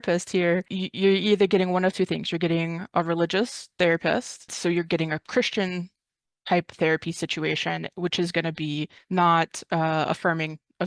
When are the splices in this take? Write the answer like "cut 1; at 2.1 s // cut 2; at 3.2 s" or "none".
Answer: cut 1; at 4.4 s